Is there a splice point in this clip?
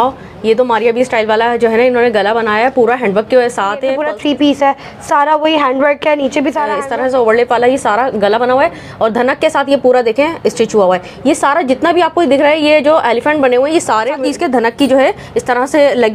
yes; 3 cuts; at 3.9 s, 6.8 s, 14.1 s

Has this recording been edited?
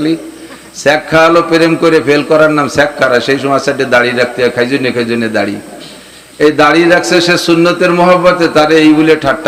no; 0 cuts

